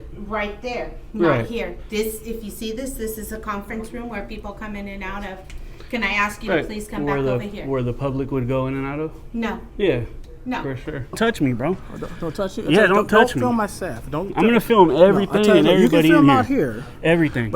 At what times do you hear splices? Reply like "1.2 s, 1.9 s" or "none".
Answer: 11.2 s